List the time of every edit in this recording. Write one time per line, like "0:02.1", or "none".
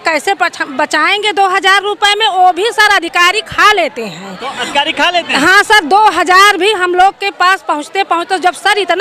none